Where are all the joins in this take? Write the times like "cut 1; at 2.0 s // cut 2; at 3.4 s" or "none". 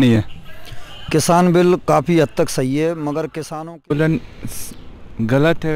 cut 1; at 3.9 s

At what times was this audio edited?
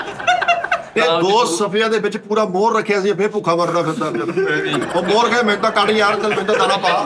cut 1; at 0.9 s

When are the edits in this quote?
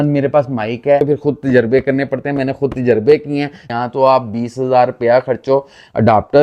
cut 1; at 1.0 s // cut 2; at 3.6 s

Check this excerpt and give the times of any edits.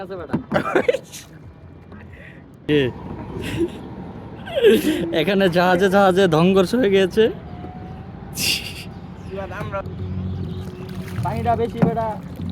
cut 1; at 2.6 s // cut 2; at 9.9 s

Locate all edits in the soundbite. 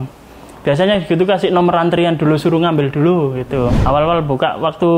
cut 1; at 3.7 s

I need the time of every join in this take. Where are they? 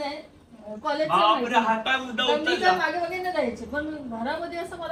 none

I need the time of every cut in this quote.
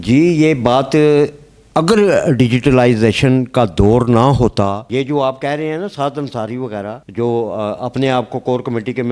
cut 1; at 4.8 s

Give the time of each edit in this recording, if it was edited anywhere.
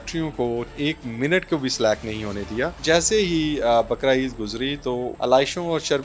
cut 1; at 0.8 s // cut 2; at 2.8 s // cut 3; at 5.1 s

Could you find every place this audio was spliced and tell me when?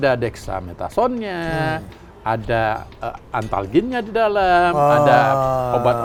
none

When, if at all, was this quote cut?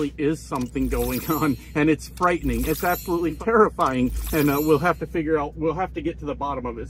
cut 1; at 3.4 s

